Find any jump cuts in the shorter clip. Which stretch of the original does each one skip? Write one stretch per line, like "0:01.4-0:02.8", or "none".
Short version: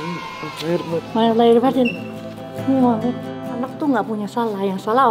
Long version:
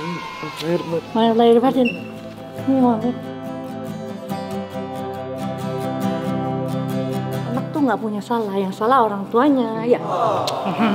0:03.6-0:07.6